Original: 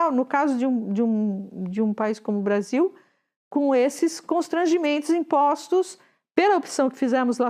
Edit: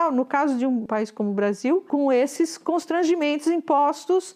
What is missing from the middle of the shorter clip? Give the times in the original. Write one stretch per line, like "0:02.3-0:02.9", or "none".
0:00.9-0:02.0
0:02.9-0:03.5